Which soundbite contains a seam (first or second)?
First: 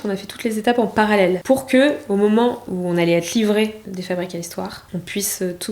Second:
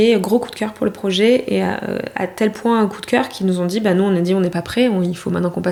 first